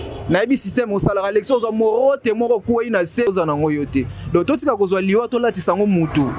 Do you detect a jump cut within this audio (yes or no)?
yes